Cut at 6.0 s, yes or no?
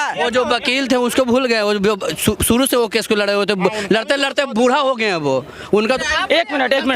yes